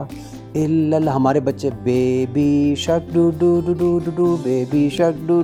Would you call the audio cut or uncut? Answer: uncut